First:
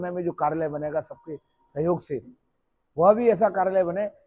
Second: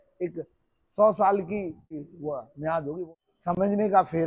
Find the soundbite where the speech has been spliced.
second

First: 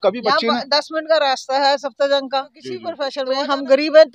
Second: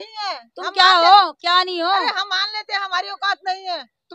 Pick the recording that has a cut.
first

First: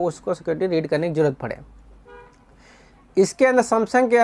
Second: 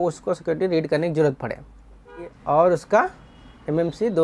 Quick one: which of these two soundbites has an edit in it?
second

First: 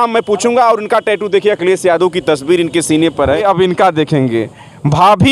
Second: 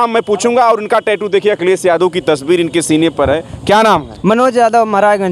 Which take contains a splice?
first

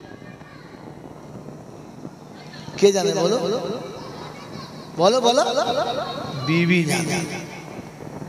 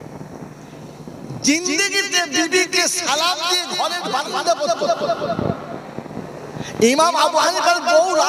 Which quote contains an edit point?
second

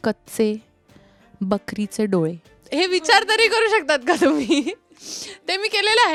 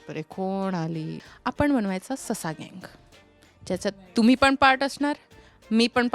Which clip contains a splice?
second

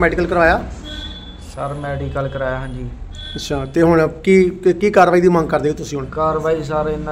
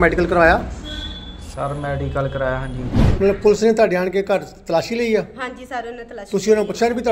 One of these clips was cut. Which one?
second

